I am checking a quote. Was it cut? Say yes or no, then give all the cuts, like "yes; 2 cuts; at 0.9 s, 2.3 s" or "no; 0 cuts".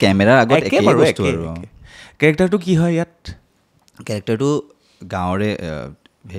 no; 0 cuts